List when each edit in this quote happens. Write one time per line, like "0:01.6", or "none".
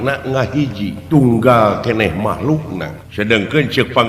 0:01.0
0:03.0